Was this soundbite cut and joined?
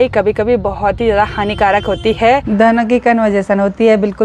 yes; 1 cut; at 2.4 s

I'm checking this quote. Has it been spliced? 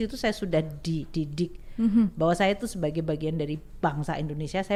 no; 0 cuts

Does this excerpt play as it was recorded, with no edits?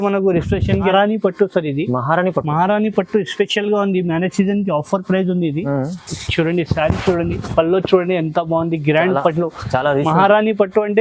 no; 1 cut; at 0.9 s

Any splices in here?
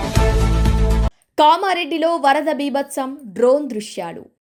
no; 0 cuts

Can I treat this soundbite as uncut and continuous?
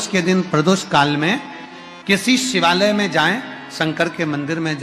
yes; 0 cuts

